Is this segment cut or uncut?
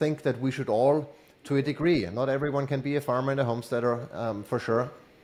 uncut